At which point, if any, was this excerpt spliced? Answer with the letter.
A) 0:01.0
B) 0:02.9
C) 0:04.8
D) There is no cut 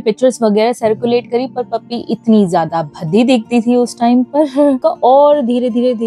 C